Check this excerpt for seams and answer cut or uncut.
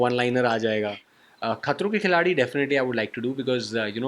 cut